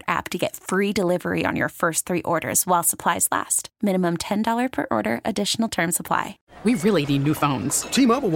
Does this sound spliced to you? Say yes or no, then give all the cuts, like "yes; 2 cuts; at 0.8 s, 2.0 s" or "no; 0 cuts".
yes; 1 cut; at 6.4 s